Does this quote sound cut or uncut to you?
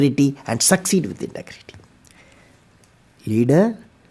uncut